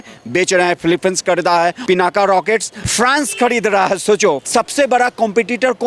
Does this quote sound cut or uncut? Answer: cut